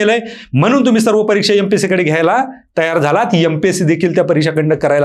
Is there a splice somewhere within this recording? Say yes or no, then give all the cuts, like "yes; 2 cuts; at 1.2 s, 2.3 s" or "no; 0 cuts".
no; 0 cuts